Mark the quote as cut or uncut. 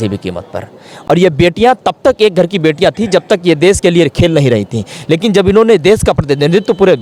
uncut